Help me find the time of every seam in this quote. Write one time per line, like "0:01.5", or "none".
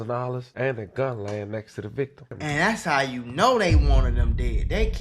0:02.3